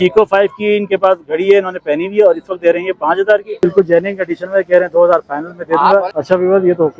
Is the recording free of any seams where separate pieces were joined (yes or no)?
no